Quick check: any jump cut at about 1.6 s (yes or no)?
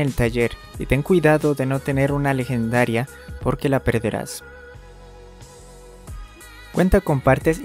no